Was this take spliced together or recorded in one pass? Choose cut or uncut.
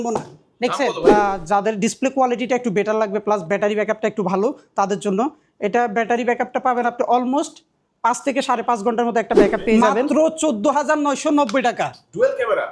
cut